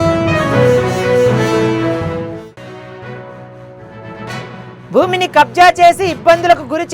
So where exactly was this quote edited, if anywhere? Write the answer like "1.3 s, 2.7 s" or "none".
2.3 s, 4.3 s